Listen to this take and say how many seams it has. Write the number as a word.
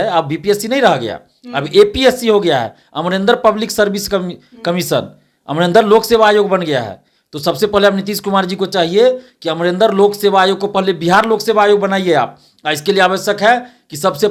zero